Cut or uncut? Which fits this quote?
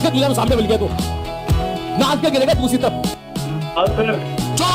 uncut